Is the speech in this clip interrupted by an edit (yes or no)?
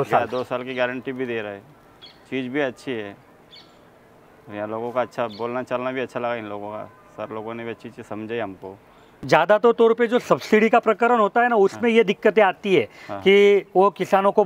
yes